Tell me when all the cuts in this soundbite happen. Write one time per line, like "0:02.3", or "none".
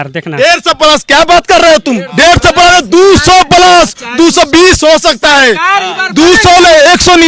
none